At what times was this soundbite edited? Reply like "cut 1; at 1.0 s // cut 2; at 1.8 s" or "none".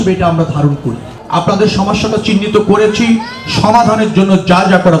cut 1; at 1.1 s

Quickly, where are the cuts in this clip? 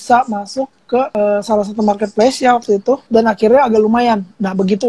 cut 1; at 1.1 s // cut 2; at 3.0 s

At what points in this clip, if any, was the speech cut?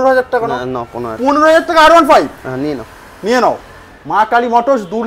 none

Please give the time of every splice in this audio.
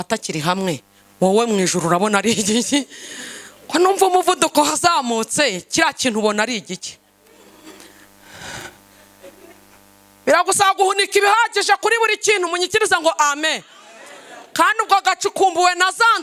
none

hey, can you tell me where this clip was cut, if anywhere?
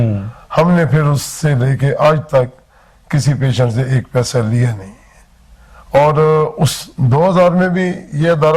none

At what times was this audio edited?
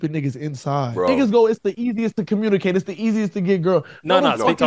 cut 1; at 1.0 s

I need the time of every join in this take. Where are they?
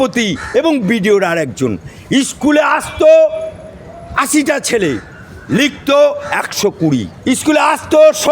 cut 1; at 7.1 s

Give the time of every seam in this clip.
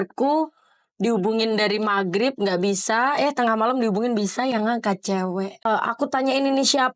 cut 1; at 5.6 s

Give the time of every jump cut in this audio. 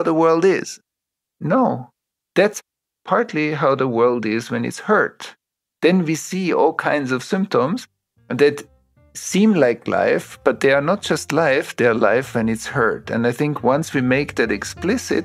cut 1; at 1.0 s

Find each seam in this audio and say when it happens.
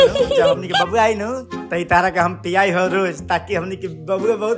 none

